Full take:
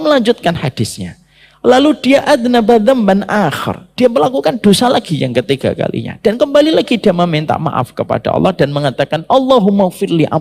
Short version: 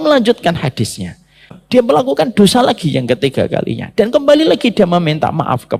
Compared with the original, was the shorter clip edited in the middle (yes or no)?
yes